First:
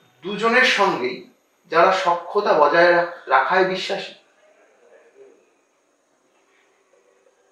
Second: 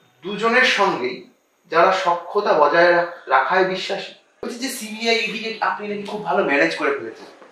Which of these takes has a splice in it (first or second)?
second